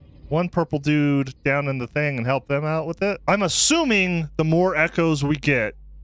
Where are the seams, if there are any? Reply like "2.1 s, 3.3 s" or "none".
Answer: 3.2 s